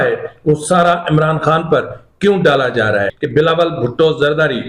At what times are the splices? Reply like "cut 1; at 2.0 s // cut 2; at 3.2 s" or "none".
cut 1; at 3.2 s